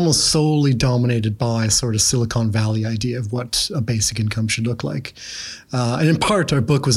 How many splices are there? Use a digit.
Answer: 0